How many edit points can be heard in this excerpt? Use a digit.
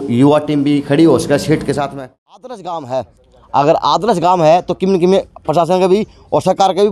1